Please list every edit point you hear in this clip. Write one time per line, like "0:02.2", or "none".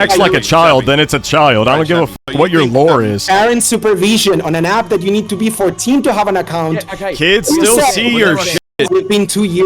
0:03.2
0:08.6